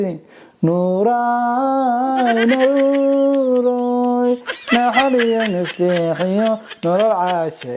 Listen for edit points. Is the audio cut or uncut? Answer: uncut